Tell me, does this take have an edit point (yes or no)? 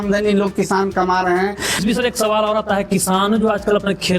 yes